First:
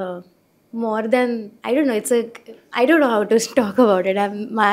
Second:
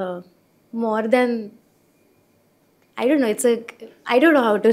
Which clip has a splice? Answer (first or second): first